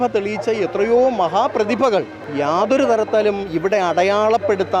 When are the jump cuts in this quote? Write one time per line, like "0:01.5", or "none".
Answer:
0:02.2